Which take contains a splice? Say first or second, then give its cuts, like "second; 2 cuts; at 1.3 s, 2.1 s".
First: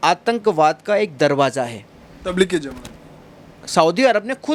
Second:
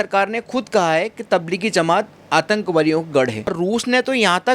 second; 1 cut; at 3.5 s